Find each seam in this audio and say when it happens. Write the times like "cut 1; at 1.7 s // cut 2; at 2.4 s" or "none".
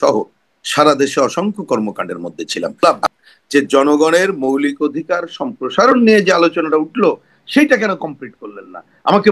cut 1; at 2.8 s